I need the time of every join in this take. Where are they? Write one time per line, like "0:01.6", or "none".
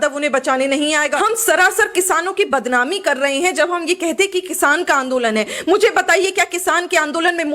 0:01.3